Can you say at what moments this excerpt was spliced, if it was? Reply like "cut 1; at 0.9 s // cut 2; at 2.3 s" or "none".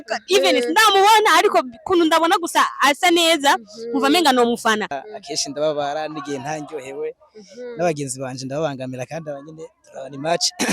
cut 1; at 5.0 s